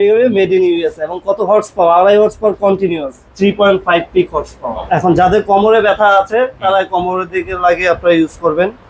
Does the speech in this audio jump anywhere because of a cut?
yes; 1 cut; at 4.8 s

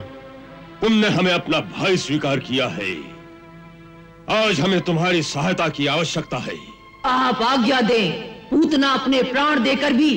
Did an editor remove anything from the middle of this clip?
no; 0 cuts

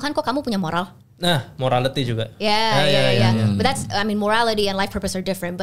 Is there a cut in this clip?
no; 0 cuts

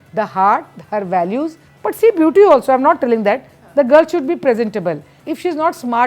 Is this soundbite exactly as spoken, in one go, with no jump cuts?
no; 2 cuts; at 1.6 s, 5.2 s

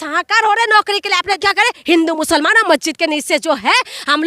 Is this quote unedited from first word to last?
no; 1 cut; at 1.4 s

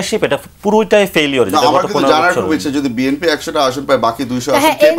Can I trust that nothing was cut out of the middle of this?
yes; 0 cuts

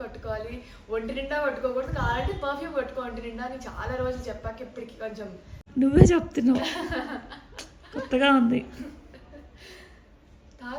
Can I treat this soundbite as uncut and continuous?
no; 1 cut; at 5.6 s

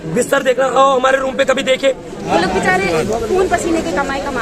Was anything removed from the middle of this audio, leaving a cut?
yes; 1 cut; at 2.1 s

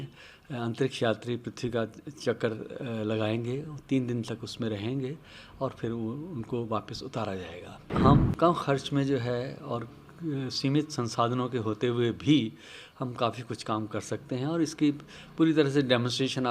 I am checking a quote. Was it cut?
yes; 1 cut; at 7.9 s

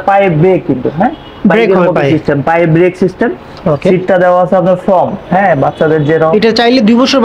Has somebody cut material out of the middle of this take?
yes; 1 cut; at 6.3 s

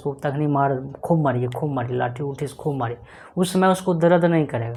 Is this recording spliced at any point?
no; 0 cuts

